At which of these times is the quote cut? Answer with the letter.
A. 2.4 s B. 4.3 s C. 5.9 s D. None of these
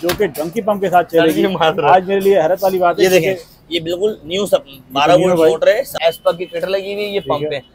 C